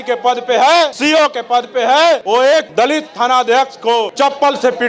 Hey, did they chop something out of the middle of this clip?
yes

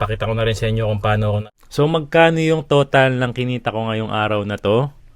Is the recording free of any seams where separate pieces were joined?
no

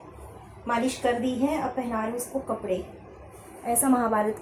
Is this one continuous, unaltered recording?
yes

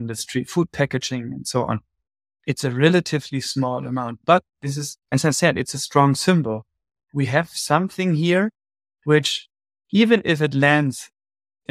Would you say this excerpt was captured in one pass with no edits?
yes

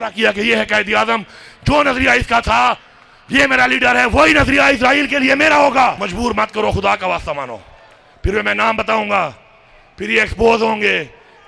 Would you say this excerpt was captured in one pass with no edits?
no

